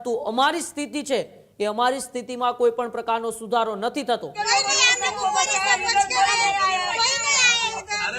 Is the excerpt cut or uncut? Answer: cut